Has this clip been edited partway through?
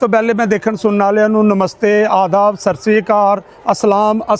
no; 0 cuts

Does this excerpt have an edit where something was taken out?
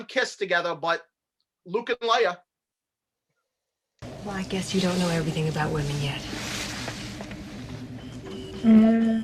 no; 0 cuts

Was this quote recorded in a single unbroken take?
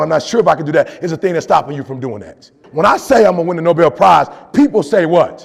no; 1 cut; at 2.6 s

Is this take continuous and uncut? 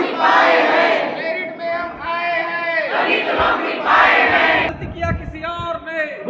no; 1 cut; at 4.7 s

